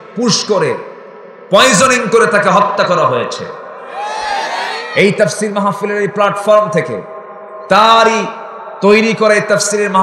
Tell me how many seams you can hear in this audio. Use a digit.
0